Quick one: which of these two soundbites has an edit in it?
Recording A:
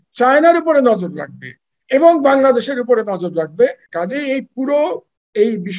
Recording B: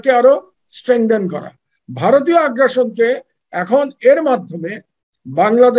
A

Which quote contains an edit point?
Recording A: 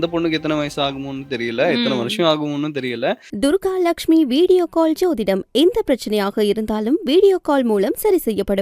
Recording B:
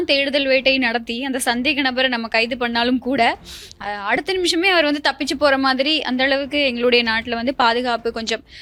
A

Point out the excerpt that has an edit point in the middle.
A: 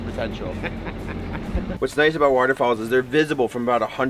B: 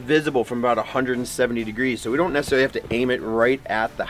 A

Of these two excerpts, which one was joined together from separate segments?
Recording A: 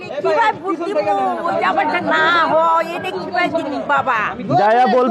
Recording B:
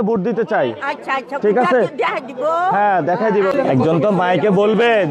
B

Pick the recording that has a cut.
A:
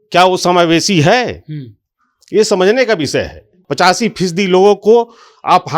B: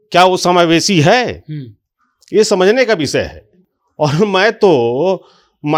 A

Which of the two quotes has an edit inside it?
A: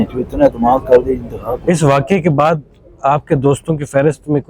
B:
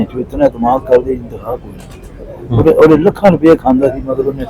A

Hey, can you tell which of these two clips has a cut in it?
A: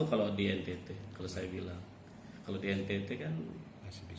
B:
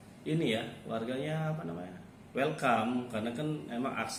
A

